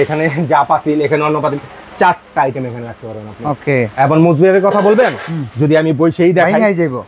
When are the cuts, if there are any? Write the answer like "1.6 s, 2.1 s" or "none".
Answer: none